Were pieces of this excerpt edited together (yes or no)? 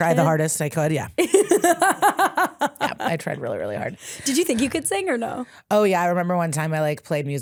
no